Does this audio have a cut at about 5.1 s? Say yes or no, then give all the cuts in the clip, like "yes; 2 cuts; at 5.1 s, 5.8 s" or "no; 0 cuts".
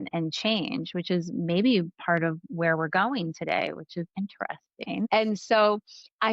yes; 1 cut; at 5.1 s